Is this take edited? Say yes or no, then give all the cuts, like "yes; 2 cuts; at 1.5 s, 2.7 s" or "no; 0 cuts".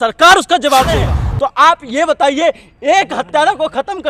yes; 1 cut; at 1.3 s